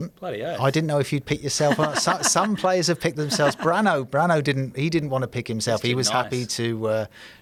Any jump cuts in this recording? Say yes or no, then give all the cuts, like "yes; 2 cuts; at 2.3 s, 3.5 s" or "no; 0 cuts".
no; 0 cuts